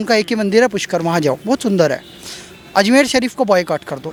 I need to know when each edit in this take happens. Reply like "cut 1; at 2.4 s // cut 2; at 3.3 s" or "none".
none